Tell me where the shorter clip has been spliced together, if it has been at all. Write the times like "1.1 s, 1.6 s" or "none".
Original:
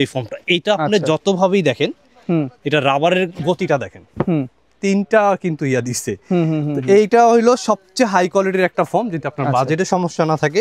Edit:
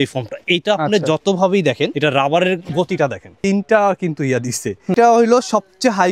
1.9 s, 3.3 s, 4.9 s